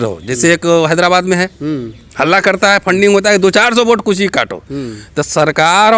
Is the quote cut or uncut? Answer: uncut